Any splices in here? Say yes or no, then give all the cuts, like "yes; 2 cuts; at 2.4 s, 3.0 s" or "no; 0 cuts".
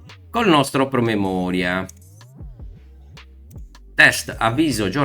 yes; 2 cuts; at 1.9 s, 3.6 s